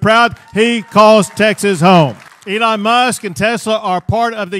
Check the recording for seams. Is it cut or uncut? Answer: cut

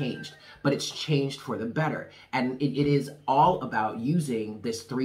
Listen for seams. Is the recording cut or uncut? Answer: uncut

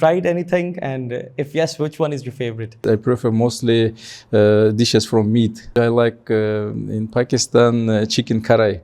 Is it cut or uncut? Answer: cut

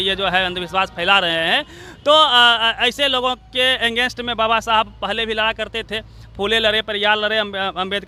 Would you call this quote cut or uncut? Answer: uncut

